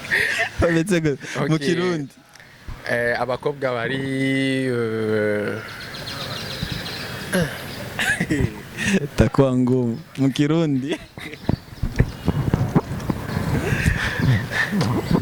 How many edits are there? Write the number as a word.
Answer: zero